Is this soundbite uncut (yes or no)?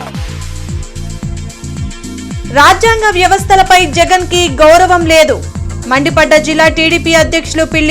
yes